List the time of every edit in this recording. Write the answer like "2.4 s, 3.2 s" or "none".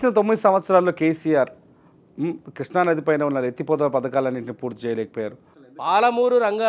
5.5 s